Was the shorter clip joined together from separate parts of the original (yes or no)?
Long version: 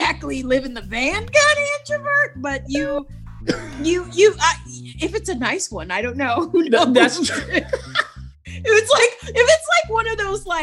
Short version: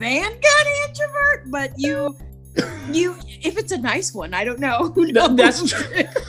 yes